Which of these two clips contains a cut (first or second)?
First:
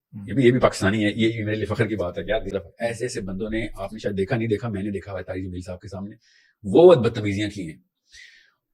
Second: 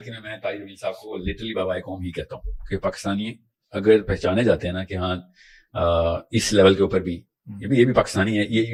first